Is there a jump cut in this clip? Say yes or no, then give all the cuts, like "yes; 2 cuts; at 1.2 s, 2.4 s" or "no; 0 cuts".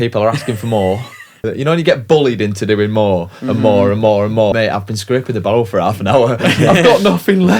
yes; 2 cuts; at 1.3 s, 4.5 s